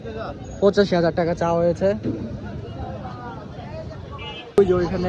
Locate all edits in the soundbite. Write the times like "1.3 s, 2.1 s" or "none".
none